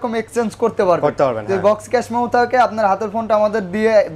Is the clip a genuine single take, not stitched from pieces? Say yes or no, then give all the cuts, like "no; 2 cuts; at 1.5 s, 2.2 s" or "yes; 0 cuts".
yes; 0 cuts